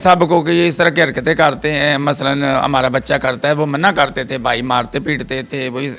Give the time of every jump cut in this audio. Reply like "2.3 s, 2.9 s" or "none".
none